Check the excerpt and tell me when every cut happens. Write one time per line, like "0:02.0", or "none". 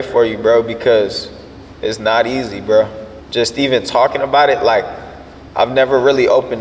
0:03.0